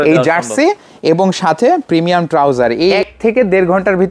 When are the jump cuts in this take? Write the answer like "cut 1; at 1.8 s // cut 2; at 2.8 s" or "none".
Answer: cut 1; at 3.0 s